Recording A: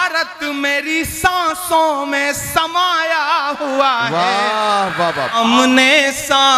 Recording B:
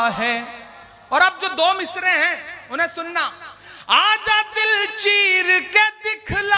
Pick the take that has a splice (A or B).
A